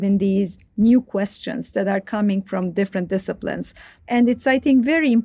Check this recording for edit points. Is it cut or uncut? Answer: cut